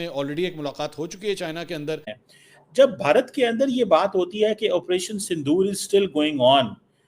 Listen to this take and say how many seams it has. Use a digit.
1